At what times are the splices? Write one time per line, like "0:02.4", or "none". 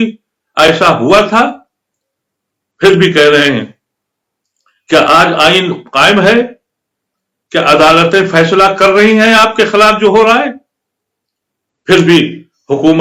none

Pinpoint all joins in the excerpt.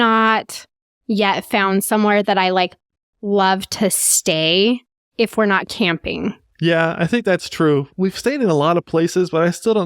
0:05.0

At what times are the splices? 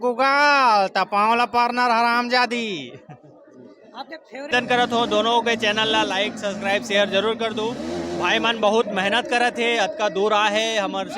0:04.5

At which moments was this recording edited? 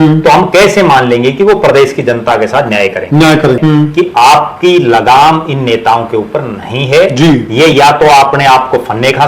0:03.6

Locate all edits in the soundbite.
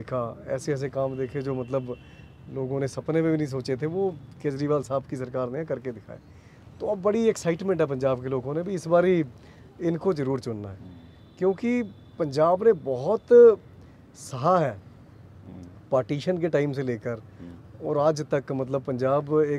none

